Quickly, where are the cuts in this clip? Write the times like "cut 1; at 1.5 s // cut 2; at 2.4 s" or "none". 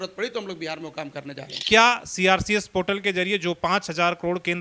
cut 1; at 1.5 s